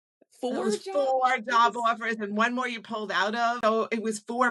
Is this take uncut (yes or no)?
no